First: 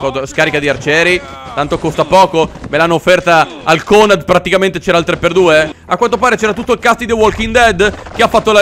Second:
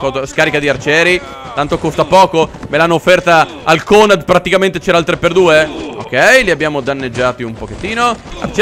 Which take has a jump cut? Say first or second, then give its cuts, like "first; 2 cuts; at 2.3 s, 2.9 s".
first; 1 cut; at 5.8 s